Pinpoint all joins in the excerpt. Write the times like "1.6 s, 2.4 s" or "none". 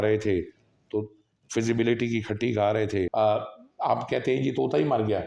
3.1 s